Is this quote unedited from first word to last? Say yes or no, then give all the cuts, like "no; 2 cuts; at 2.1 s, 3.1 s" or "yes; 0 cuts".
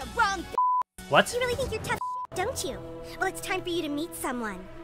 yes; 0 cuts